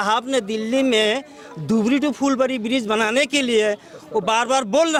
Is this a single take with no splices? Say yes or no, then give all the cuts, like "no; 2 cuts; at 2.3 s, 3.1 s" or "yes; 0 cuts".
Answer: yes; 0 cuts